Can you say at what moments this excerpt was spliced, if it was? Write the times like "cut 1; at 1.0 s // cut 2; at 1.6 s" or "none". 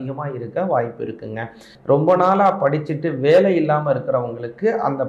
cut 1; at 1.7 s

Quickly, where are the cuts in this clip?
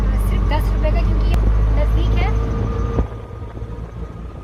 none

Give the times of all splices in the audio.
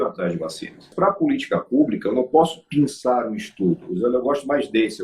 cut 1; at 0.9 s

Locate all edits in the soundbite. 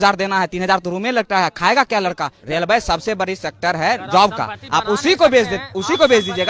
cut 1; at 2.3 s

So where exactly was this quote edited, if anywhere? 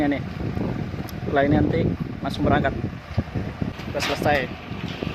cut 1; at 3.7 s

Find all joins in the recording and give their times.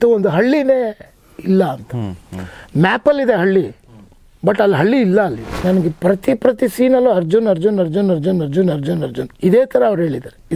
cut 1; at 5.6 s // cut 2; at 9.2 s

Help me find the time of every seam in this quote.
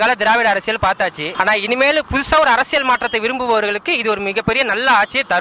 none

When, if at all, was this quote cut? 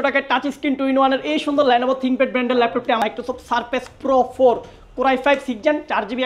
cut 1; at 3.0 s

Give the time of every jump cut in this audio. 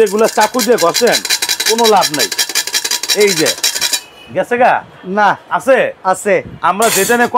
none

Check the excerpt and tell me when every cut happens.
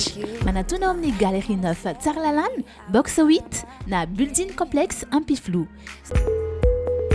cut 1; at 6.1 s

